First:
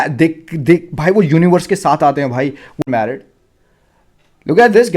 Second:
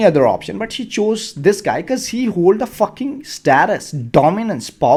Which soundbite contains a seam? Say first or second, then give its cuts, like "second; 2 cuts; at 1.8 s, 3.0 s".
first; 1 cut; at 2.8 s